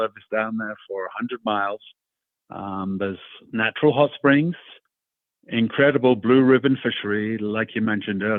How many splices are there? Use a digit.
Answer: 0